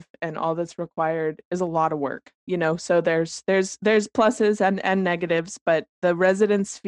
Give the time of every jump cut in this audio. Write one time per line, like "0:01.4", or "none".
0:02.3